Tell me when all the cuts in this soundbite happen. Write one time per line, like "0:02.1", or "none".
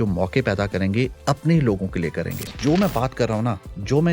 0:02.5